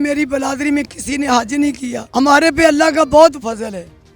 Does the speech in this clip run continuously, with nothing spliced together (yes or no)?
no